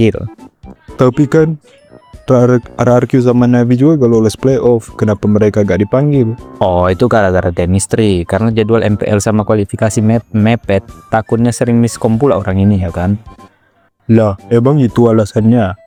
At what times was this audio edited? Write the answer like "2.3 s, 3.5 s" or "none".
none